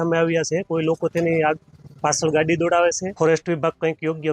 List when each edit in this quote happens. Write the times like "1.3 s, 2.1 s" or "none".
3.1 s